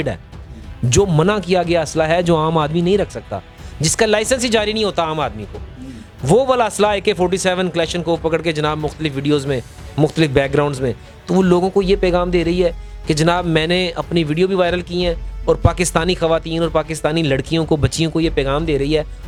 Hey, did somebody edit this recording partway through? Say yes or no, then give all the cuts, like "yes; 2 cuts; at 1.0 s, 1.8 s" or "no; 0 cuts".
no; 0 cuts